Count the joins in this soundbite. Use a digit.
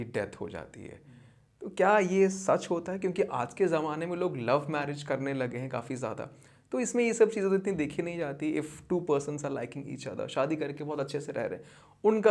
0